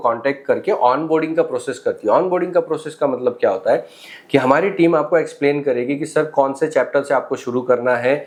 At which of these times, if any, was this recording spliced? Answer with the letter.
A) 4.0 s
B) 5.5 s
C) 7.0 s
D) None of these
D